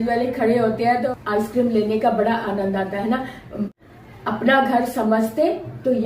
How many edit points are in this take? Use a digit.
2